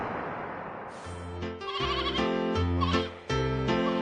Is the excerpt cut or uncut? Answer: cut